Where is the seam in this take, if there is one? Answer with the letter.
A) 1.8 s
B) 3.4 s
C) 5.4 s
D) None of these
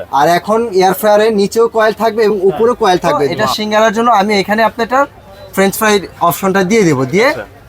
B